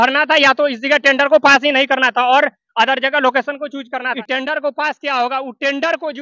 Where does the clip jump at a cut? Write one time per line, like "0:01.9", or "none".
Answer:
0:04.0

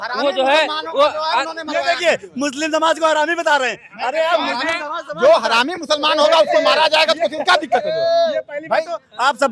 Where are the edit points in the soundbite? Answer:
none

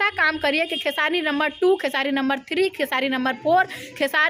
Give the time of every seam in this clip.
none

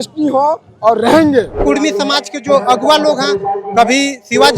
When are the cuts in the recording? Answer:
0:01.5

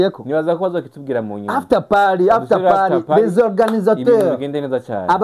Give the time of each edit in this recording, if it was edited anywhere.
none

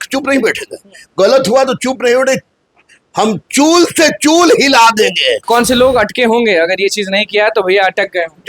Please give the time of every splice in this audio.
0:05.5

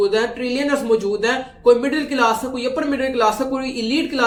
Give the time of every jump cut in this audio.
none

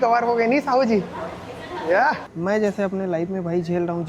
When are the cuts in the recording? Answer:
0:02.3

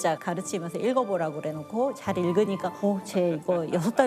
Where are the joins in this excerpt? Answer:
0:02.8

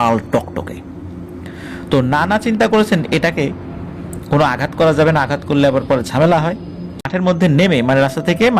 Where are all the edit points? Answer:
0:07.1

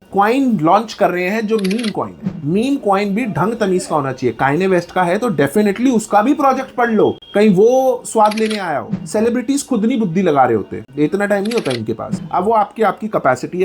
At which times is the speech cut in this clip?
0:02.2
0:08.9
0:12.1

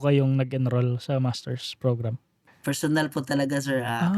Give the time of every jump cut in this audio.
0:02.4

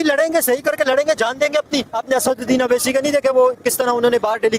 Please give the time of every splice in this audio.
0:01.9

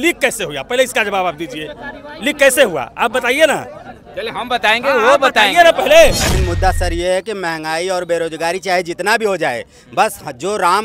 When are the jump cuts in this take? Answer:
0:06.3

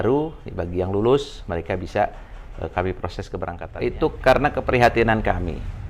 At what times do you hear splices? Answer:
0:03.6

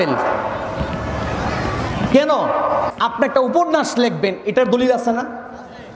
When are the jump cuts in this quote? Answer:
0:02.9

